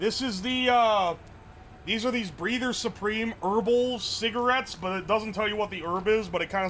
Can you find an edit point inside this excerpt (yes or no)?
no